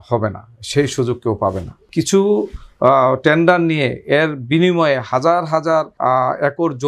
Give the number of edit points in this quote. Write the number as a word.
two